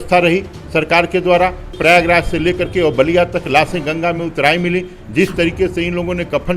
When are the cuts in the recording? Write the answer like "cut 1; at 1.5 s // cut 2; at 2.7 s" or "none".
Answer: cut 1; at 1.7 s